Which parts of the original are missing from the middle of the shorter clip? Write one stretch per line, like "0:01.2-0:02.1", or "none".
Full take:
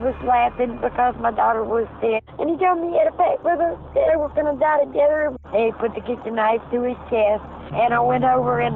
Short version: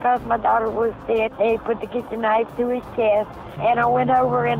0:02.2-0:05.5